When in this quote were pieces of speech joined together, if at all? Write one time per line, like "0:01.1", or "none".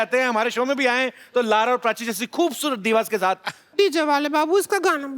0:03.6